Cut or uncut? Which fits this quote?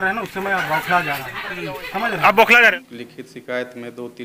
cut